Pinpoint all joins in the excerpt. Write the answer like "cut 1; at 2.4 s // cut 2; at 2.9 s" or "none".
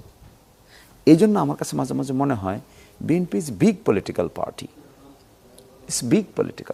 none